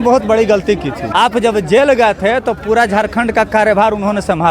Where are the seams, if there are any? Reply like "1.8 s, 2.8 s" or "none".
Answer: 1.0 s

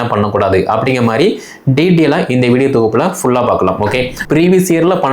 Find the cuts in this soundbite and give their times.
4.1 s

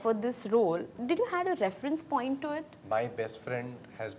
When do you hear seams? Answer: 0.9 s

